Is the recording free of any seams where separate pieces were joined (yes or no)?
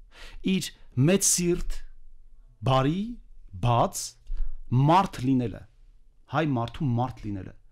yes